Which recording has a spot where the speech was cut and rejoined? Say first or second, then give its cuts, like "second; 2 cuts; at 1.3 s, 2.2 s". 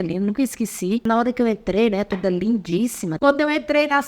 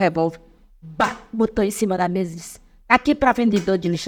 first; 2 cuts; at 1.1 s, 3.1 s